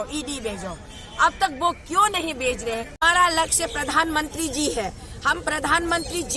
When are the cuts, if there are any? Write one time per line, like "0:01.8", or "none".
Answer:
0:03.0